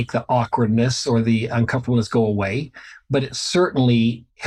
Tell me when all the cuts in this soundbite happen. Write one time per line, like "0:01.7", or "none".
none